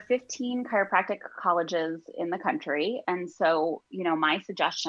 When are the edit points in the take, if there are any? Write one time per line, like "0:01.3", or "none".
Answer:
none